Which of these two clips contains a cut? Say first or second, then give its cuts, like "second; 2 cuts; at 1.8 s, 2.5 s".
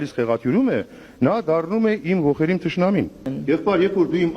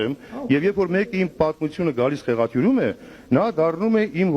first; 1 cut; at 3.2 s